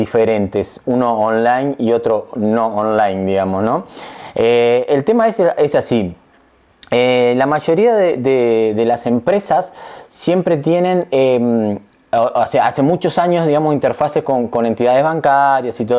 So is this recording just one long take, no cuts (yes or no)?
yes